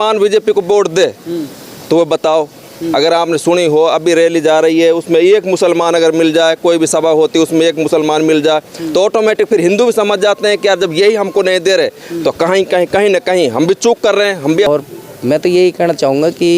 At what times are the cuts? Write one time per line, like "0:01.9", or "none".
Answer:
0:14.7